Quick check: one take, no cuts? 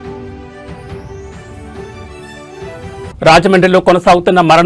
no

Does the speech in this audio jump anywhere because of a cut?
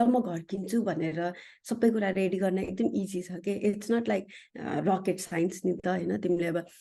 no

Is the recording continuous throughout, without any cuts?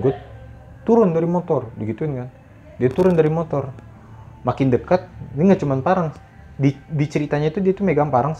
yes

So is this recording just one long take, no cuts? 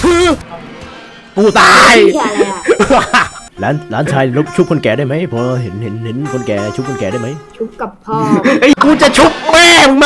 no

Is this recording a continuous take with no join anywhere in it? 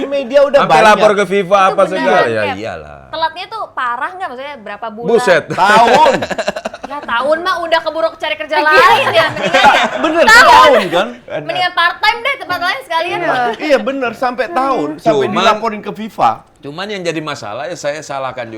yes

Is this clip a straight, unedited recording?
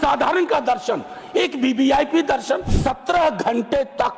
no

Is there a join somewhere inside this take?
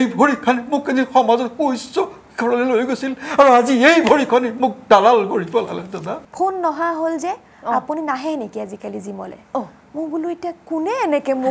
yes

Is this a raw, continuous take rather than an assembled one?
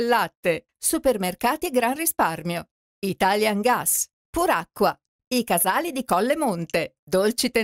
no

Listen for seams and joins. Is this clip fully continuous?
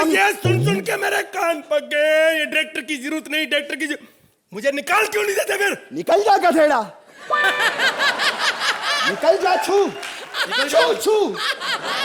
yes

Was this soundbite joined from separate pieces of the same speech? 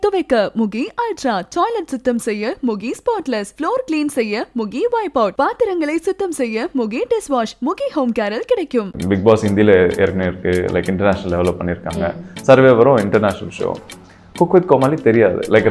yes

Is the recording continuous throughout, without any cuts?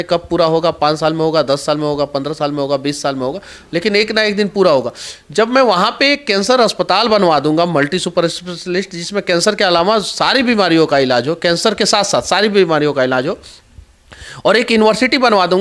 yes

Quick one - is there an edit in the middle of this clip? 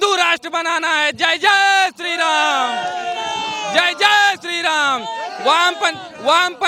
no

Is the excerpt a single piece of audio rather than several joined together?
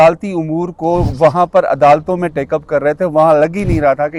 yes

